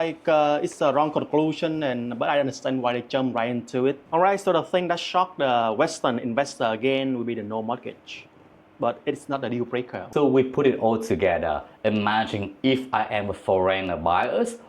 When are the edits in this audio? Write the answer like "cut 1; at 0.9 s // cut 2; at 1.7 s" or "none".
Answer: cut 1; at 4.0 s // cut 2; at 10.0 s